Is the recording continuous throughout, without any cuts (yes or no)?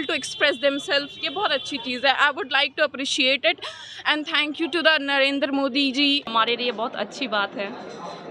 yes